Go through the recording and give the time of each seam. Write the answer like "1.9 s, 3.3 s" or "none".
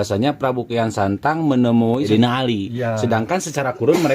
2.1 s

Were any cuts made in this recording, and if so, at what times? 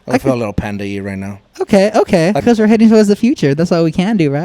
2.4 s

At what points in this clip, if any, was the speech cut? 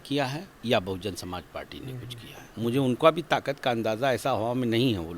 2.5 s

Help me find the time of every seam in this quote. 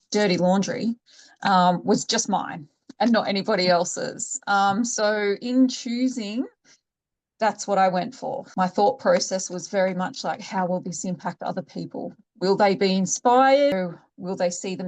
13.7 s

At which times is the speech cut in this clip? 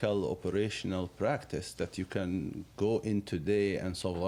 none

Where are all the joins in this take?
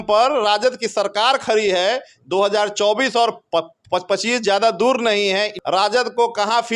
5.6 s

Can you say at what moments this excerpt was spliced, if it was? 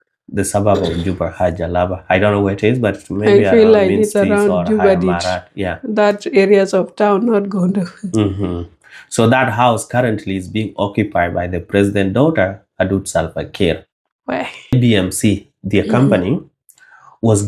14.7 s

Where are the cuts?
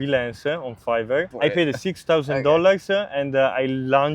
1.3 s

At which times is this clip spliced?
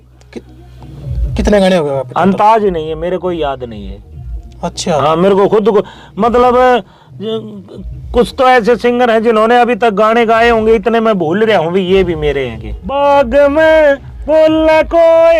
12.9 s

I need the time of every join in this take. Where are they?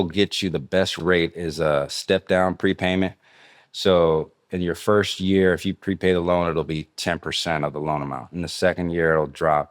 1.0 s

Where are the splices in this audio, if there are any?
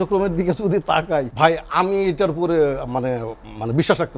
1.3 s

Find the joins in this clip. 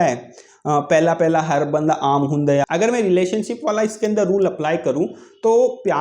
2.6 s

